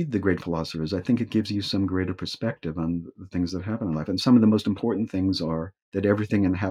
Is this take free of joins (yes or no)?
no